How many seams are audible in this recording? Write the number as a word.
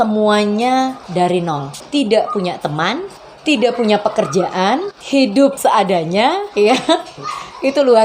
four